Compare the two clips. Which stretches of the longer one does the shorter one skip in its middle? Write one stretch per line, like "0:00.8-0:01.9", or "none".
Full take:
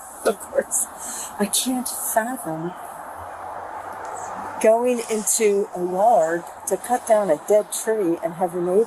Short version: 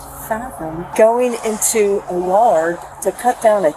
0:02.8-0:04.6